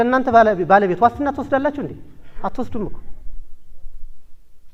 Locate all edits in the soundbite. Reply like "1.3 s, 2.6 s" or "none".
none